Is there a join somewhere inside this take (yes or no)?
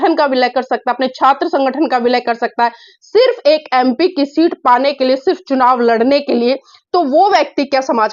no